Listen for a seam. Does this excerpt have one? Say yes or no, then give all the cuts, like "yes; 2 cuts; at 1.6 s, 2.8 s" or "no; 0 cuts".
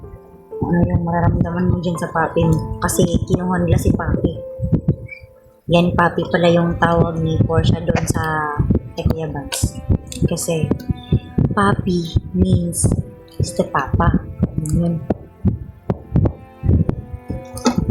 no; 0 cuts